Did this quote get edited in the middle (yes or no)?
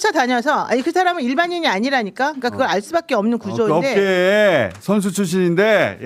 no